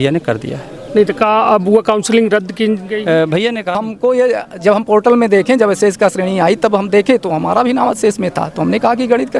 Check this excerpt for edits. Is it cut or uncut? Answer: cut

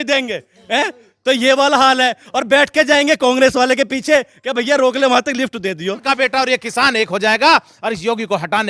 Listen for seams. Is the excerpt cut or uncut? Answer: cut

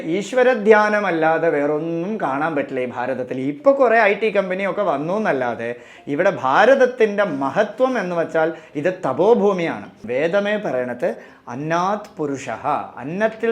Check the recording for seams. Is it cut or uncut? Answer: cut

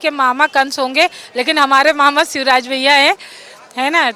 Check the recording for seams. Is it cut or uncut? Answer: uncut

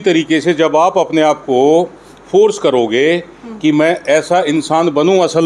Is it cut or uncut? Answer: uncut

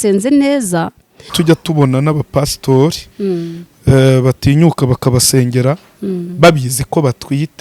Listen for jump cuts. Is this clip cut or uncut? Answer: cut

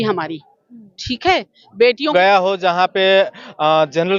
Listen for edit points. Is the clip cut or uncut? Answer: cut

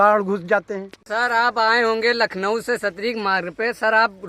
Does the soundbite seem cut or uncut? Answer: cut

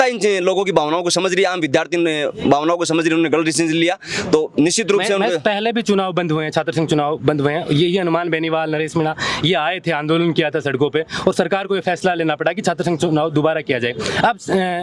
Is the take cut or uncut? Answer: uncut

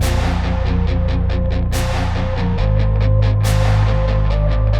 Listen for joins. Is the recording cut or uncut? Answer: uncut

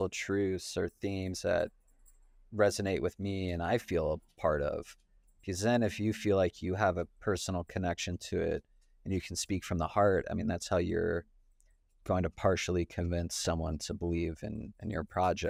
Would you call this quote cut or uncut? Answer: uncut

